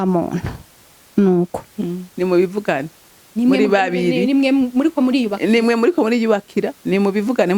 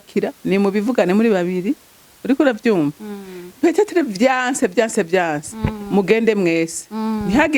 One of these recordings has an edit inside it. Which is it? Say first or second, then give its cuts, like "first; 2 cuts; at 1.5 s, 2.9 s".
first; 1 cut; at 2.0 s